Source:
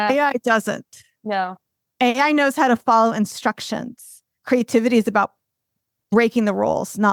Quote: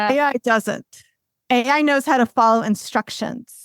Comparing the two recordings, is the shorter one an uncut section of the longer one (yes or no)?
no